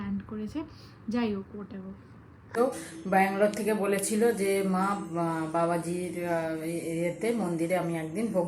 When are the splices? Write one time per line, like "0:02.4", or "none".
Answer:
0:02.6